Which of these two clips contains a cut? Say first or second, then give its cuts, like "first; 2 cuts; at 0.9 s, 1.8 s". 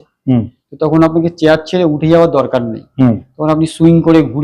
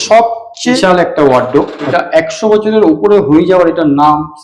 second; 2 cuts; at 0.8 s, 1.9 s